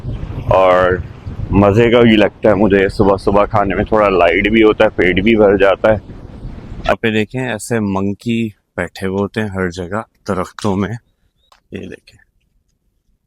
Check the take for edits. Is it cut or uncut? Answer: cut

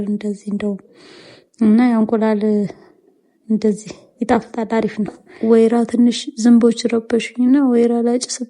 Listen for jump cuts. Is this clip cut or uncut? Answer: cut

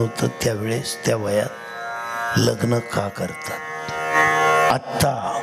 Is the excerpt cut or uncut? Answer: cut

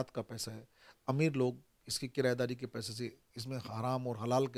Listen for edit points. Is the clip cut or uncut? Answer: uncut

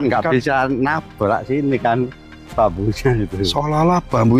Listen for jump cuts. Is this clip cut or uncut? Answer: uncut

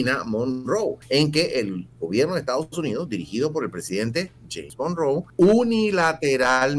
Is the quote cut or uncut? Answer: cut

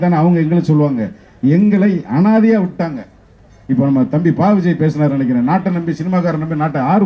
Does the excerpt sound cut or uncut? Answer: uncut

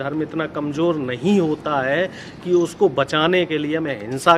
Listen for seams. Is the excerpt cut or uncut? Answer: uncut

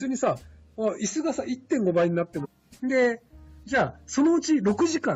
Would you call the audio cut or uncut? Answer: uncut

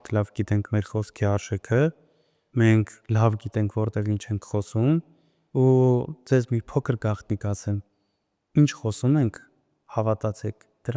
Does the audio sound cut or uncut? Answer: uncut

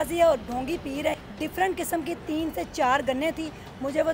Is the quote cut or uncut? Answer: cut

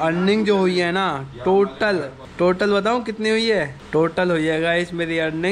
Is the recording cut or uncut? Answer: uncut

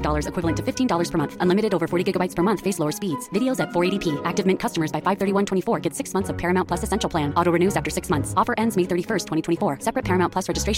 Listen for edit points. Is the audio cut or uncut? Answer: uncut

